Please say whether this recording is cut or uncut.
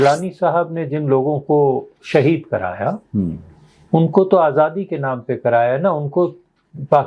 uncut